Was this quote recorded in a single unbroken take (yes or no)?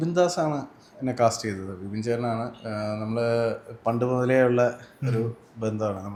yes